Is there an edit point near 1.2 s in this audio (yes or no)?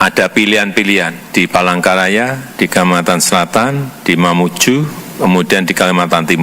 yes